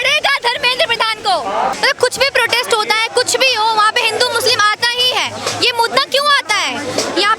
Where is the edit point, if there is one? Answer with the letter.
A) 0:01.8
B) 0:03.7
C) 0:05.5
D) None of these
A